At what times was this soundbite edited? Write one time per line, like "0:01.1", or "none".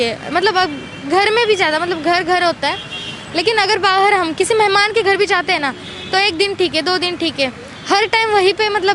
none